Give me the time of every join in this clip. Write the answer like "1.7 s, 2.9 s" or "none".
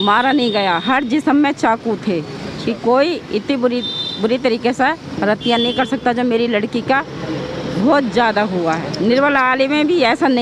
none